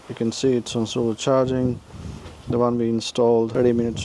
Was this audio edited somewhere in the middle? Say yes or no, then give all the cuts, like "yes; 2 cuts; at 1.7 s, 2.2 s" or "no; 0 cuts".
no; 0 cuts